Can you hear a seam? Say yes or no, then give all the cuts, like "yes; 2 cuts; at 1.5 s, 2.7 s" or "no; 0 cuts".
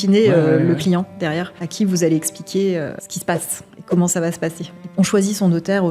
yes; 3 cuts; at 1.6 s, 3.1 s, 4.9 s